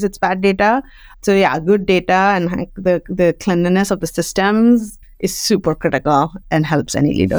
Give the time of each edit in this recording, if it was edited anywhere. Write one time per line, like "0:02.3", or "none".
0:01.1
0:05.0
0:06.4